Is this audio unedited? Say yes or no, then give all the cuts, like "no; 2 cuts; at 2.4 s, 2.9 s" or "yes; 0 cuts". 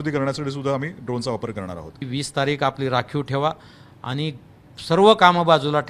no; 1 cut; at 2.1 s